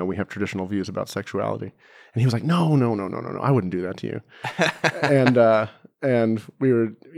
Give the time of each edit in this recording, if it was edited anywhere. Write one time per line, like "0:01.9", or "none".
none